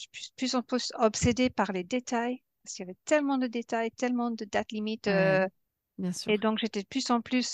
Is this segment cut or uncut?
cut